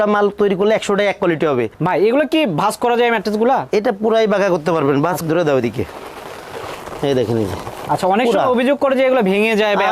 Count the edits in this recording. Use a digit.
2